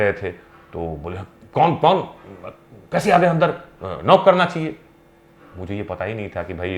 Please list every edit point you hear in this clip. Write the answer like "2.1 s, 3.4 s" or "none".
none